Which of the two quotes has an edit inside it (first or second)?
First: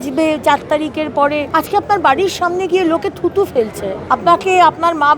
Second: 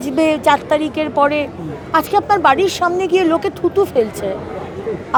first